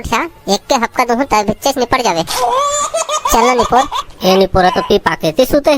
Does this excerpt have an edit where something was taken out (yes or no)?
yes